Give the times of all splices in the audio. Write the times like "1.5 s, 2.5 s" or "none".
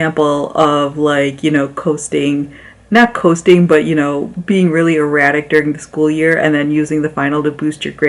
none